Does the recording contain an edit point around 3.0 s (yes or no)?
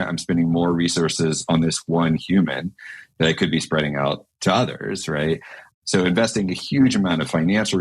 no